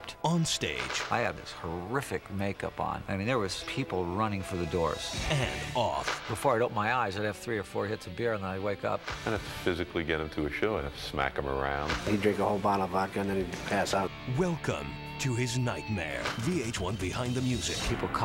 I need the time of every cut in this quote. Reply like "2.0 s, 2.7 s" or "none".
none